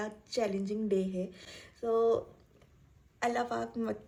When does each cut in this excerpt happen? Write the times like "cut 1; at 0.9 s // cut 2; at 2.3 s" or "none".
none